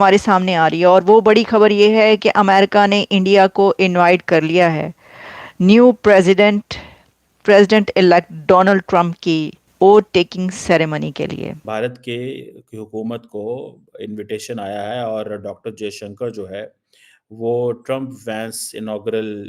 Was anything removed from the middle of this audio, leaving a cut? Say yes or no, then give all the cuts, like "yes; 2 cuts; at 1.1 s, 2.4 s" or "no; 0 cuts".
yes; 2 cuts; at 9.6 s, 11.7 s